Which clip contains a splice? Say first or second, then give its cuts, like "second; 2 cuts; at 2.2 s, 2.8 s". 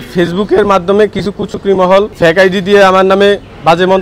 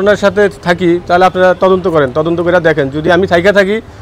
first; 1 cut; at 2.1 s